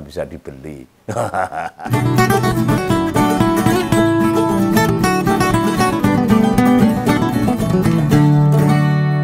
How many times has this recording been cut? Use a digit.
1